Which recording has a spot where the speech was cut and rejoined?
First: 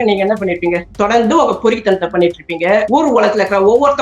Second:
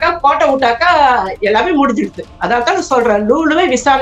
first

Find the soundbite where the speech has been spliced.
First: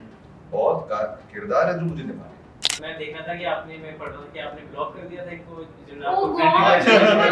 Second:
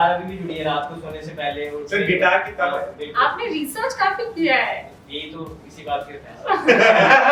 first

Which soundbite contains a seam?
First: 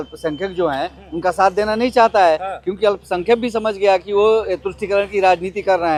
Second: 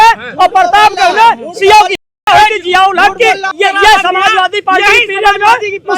second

